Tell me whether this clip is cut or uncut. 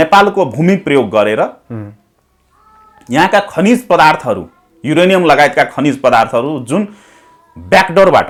uncut